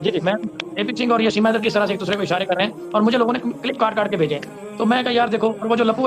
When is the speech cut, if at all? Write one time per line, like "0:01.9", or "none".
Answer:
none